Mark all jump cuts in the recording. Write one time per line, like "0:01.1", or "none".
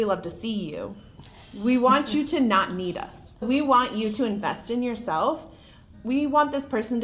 0:03.4
0:06.0